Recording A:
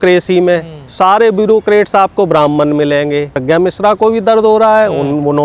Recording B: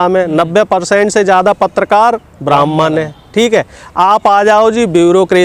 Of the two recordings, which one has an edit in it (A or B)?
A